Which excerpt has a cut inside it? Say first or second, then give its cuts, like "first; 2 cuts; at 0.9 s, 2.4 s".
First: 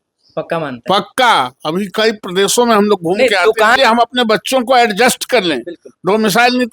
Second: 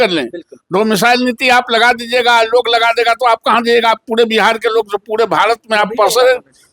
first; 1 cut; at 3.8 s